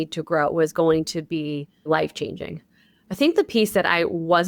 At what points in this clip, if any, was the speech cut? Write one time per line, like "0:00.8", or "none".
0:01.9